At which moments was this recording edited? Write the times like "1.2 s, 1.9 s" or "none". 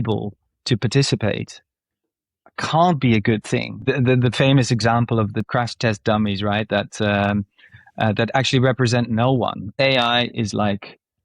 3.9 s, 5.4 s, 9.7 s